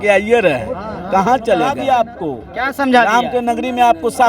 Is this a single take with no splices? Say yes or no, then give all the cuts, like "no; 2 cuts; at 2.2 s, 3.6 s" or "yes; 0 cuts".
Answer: no; 1 cut; at 1.7 s